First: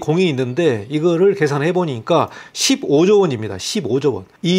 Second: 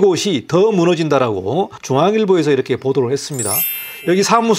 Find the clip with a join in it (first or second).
second